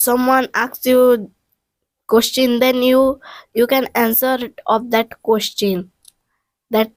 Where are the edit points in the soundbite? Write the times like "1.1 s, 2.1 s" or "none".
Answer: none